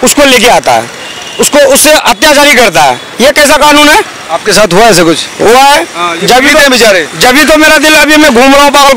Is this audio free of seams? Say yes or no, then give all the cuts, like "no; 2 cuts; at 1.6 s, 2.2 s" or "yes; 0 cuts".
yes; 0 cuts